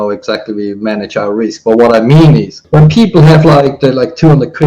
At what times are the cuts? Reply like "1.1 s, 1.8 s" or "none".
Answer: 2.6 s